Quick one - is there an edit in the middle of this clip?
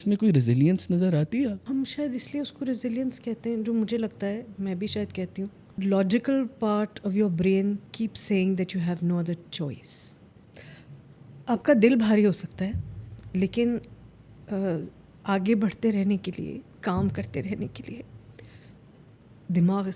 yes; 4 cuts; at 1.6 s, 5.7 s, 7.9 s, 10.4 s

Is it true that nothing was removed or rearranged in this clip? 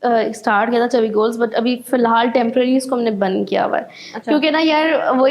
yes; 0 cuts

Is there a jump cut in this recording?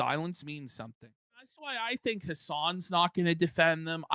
yes; 1 cut; at 1.3 s

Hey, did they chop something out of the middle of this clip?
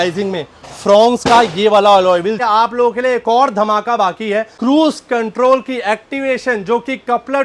yes; 2 cuts; at 2.4 s, 4.5 s

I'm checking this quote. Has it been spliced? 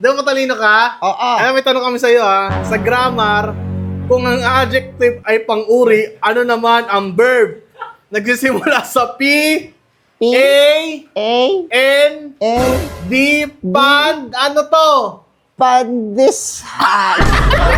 no; 0 cuts

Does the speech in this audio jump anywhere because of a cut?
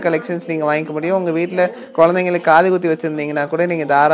no; 0 cuts

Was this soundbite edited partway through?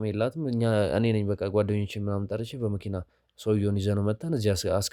no; 0 cuts

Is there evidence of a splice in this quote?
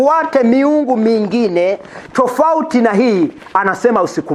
no; 0 cuts

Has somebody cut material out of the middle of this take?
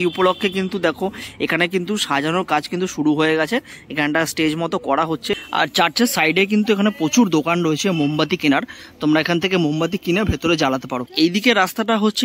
no; 0 cuts

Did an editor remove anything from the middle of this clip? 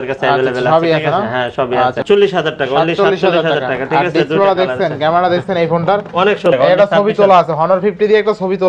yes; 2 cuts; at 2.0 s, 6.4 s

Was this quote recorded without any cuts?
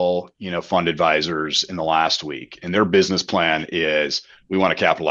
yes; 0 cuts

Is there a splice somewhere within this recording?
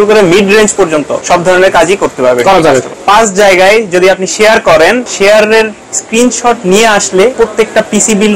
yes; 4 cuts; at 1.2 s, 3.0 s, 5.1 s, 7.3 s

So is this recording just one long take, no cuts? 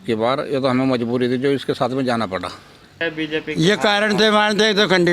no; 1 cut; at 2.9 s

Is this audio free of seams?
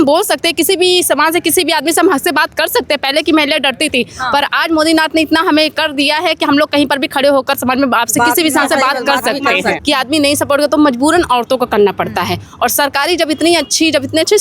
no; 1 cut; at 9.8 s

